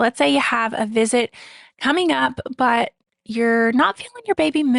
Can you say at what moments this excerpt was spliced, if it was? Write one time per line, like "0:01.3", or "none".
none